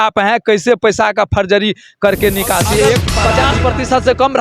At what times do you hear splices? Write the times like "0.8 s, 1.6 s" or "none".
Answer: 3.1 s